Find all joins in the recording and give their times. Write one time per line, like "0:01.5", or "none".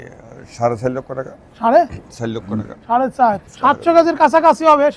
0:03.5